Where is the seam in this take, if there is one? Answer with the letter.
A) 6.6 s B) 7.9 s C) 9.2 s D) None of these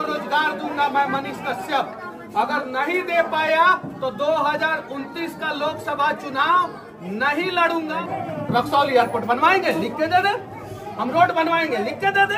B